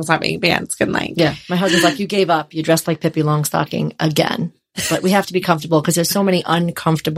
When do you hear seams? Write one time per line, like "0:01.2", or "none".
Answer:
none